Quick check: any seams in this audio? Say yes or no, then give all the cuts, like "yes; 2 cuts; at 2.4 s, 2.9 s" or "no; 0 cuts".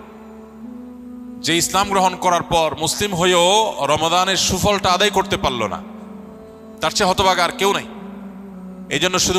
no; 0 cuts